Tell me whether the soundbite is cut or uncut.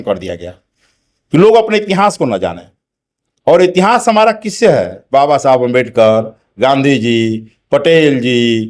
uncut